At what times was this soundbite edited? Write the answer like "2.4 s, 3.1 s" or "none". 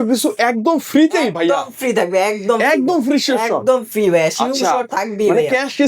none